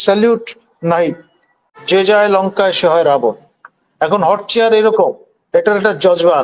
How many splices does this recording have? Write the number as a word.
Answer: one